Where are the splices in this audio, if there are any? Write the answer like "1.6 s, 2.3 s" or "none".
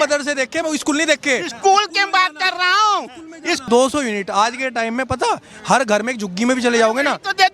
3.6 s